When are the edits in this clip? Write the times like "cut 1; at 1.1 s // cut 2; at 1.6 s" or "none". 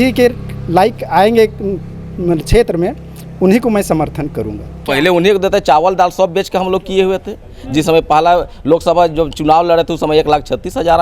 cut 1; at 4.9 s